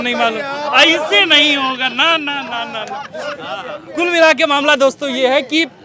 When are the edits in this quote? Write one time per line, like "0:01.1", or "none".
none